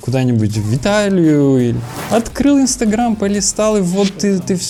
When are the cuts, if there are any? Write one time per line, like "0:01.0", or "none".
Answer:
none